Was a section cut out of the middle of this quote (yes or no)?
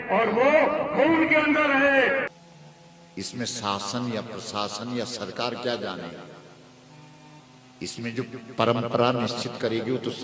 yes